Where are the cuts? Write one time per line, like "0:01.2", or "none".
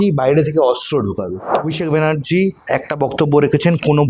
0:01.5